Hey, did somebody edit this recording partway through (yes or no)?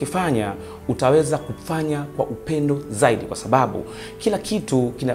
no